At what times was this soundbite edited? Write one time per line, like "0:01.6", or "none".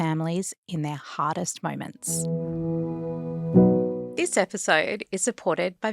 0:02.0
0:04.0